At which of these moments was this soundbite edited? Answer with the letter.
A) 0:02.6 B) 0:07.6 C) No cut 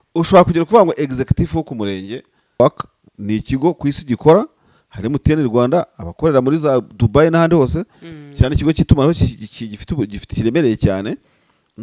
A